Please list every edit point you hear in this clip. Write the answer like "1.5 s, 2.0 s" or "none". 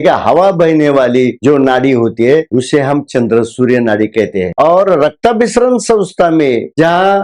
none